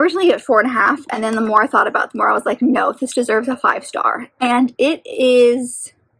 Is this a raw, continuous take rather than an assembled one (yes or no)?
yes